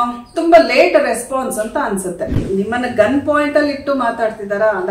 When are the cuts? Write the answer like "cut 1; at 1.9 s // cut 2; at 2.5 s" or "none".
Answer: cut 1; at 2.4 s